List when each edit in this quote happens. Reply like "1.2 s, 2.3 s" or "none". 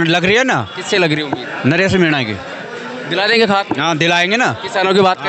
none